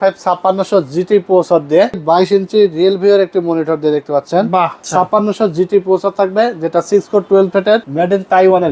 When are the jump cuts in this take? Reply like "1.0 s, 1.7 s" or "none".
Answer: 2.0 s, 4.9 s, 7.9 s